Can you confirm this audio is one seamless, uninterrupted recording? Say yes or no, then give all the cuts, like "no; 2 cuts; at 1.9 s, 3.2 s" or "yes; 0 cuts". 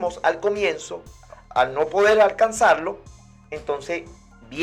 yes; 0 cuts